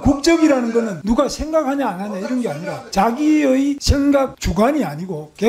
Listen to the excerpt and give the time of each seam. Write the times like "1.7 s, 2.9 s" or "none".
1.0 s, 2.7 s, 4.1 s